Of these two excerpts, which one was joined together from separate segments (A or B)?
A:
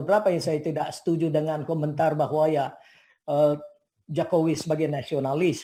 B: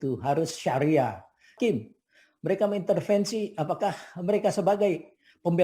B